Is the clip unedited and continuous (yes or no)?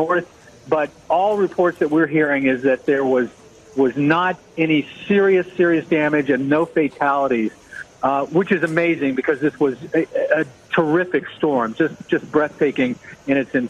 no